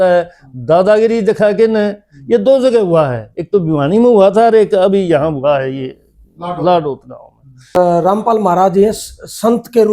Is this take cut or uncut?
cut